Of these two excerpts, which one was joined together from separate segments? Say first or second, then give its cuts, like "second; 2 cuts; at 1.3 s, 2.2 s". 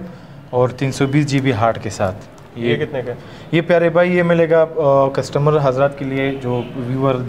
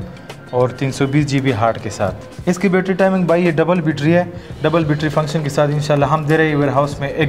second; 1 cut; at 2.3 s